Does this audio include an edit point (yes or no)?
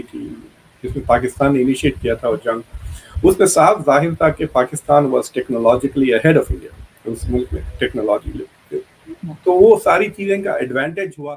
no